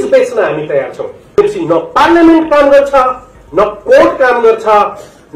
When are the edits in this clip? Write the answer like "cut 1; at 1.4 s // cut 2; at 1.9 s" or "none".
cut 1; at 1.4 s

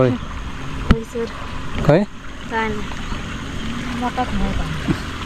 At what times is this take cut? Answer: none

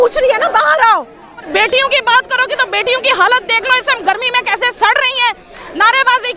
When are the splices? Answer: cut 1; at 1.5 s

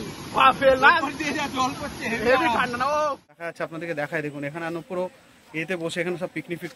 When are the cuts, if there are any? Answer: cut 1; at 3.5 s

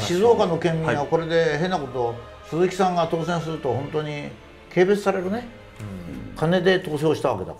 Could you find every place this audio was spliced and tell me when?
none

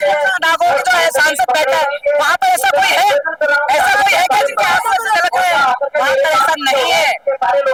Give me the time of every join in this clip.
none

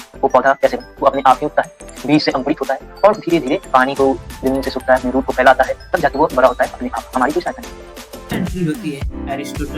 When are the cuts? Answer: cut 1; at 8.3 s

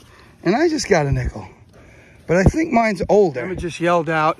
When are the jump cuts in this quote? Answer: cut 1; at 3.5 s

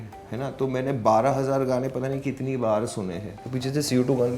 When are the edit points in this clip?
cut 1; at 3.3 s

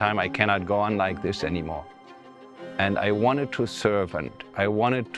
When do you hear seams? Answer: none

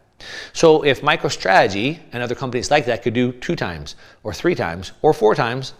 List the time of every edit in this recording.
none

